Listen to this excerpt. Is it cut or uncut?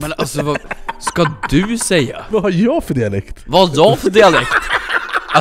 cut